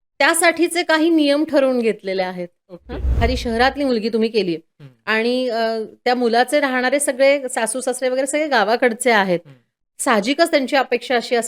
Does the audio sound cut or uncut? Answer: cut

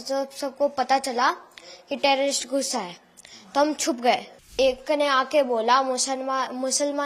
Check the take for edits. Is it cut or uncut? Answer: cut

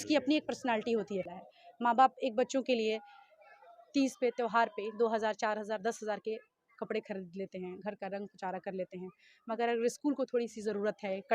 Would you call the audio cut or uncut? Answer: cut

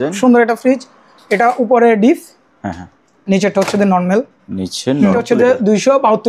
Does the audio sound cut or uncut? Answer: cut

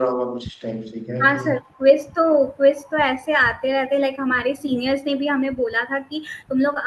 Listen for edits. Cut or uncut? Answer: uncut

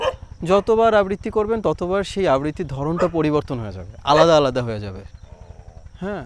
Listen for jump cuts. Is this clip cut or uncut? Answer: uncut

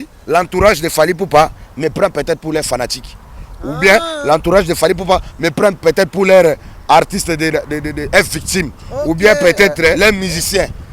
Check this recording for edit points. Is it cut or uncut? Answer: cut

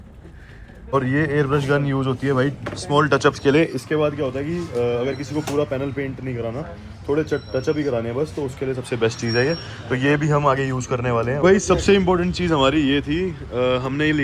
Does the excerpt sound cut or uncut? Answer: cut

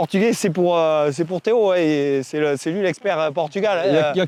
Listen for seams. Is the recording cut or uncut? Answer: uncut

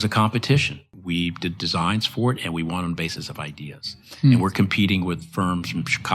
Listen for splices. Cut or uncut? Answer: cut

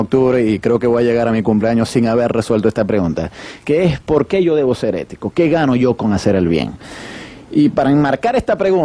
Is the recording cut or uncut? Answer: uncut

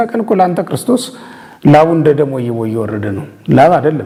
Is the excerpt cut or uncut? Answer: uncut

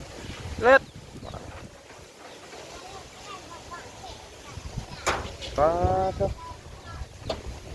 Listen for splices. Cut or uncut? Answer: uncut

